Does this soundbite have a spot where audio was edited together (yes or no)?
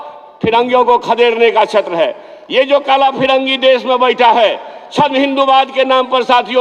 no